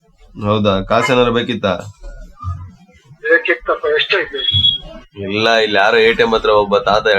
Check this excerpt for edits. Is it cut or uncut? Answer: uncut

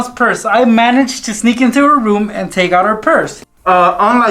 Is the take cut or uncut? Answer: cut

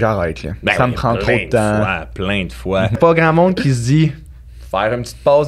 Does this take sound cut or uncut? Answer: cut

